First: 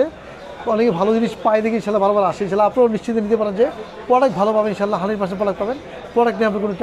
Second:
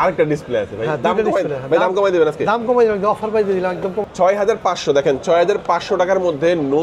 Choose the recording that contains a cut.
second; 1 cut; at 4.0 s

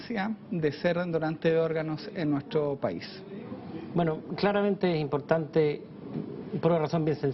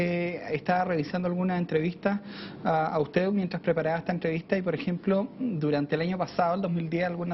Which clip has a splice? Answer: first; 1 cut; at 5.8 s

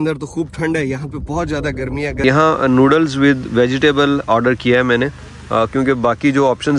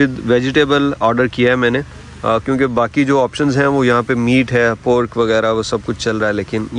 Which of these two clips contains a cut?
first; 1 cut; at 2.2 s

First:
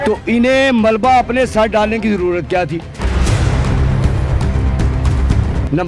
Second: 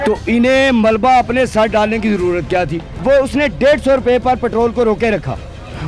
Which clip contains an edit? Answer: second; 1 cut; at 2.9 s

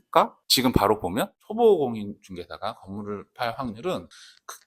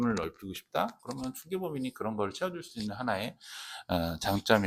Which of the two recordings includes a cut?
first; 1 cut; at 1.4 s

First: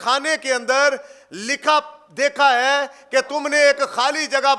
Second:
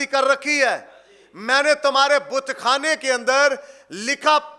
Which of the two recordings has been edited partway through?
first; 1 cut; at 3.3 s

